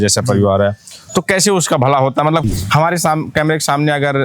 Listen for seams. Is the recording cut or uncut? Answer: cut